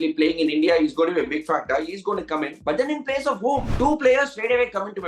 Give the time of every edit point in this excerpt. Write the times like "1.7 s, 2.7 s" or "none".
3.7 s